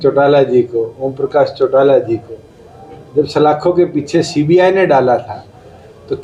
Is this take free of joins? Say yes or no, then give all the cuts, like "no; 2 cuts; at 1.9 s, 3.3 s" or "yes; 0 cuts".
yes; 0 cuts